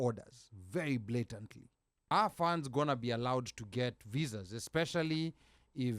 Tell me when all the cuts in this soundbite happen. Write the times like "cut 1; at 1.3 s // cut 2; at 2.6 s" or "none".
cut 1; at 2.1 s